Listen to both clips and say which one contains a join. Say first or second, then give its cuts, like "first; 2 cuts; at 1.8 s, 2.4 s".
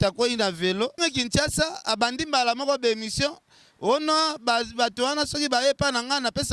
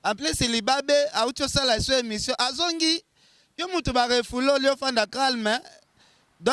first; 1 cut; at 1.0 s